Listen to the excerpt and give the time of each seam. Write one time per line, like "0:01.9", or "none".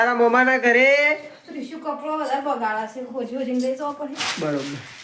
none